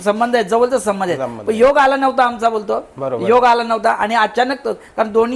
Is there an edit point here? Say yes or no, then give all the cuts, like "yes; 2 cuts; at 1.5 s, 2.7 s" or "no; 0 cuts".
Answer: no; 0 cuts